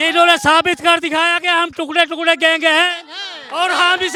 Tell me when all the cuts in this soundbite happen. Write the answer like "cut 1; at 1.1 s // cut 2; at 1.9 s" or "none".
none